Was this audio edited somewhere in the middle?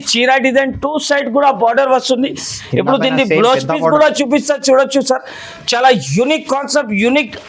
no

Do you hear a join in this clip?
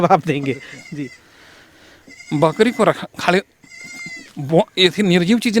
no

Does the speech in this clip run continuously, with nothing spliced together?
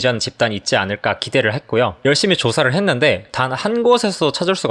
no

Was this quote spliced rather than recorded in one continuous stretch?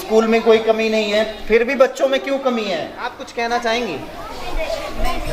yes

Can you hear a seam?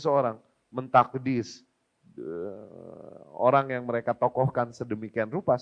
no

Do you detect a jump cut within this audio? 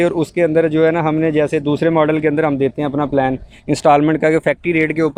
no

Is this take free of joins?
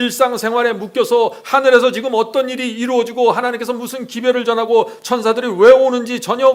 yes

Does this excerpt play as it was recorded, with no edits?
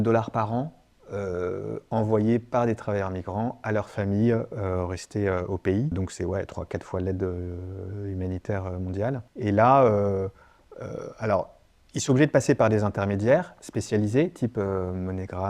no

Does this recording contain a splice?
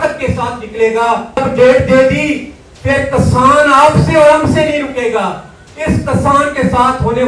yes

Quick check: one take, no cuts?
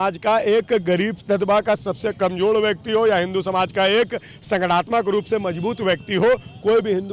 yes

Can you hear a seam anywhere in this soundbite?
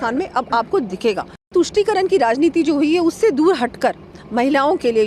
yes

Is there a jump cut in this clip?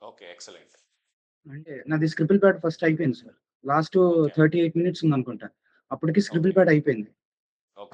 yes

